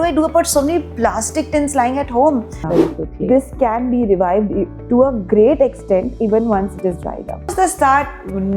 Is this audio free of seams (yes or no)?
no